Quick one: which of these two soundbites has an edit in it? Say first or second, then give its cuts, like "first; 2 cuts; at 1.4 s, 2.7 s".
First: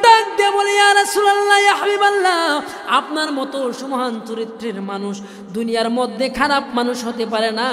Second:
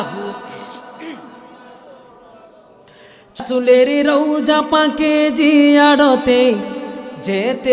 second; 1 cut; at 3.4 s